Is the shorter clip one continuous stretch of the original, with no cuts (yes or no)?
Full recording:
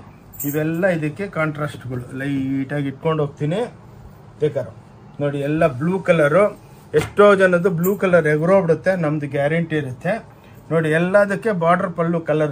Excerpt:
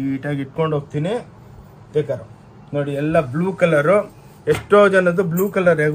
yes